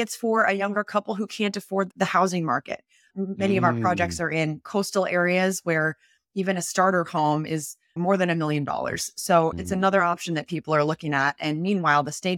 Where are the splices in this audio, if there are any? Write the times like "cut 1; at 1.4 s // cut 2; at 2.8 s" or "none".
cut 1; at 9.6 s